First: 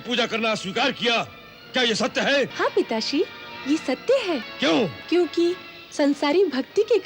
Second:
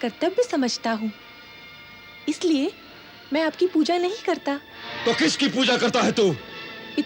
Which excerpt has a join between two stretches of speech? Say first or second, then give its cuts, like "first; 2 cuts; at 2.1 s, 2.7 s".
first; 2 cuts; at 2.5 s, 4.5 s